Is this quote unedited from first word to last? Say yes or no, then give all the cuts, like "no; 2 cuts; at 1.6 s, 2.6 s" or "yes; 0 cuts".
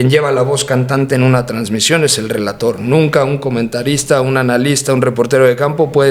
yes; 0 cuts